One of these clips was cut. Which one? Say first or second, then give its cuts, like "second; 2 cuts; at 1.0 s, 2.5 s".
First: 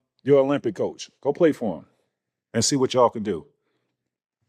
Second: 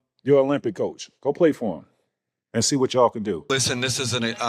second; 1 cut; at 3.5 s